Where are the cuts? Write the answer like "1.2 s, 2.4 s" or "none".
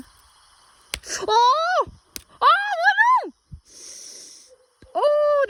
none